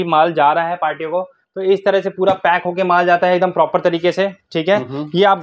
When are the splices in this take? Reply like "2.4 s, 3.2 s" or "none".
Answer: none